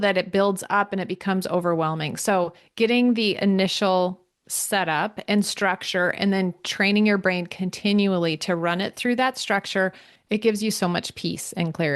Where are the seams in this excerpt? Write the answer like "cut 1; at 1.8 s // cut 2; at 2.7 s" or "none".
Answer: cut 1; at 10.1 s